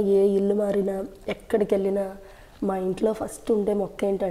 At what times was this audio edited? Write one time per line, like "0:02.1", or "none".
none